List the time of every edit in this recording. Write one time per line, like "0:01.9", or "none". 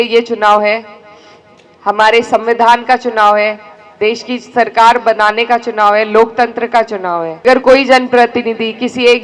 0:07.4